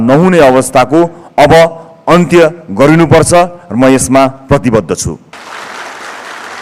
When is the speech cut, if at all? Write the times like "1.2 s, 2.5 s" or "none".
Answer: 5.3 s